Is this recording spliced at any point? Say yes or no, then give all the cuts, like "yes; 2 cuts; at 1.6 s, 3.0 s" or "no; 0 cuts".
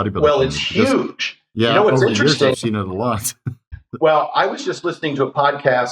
no; 0 cuts